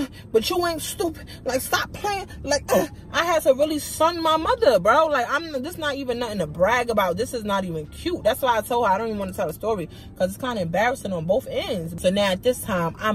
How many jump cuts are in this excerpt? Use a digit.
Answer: 1